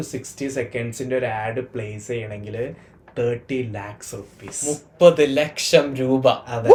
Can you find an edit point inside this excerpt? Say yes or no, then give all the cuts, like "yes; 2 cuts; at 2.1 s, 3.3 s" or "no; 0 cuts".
no; 0 cuts